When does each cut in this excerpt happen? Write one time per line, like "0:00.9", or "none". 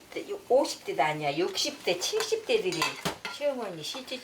0:03.2